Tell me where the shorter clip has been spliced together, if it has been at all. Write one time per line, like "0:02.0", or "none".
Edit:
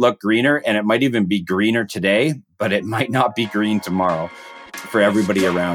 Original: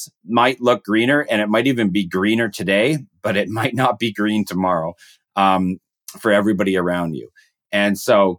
0:04.6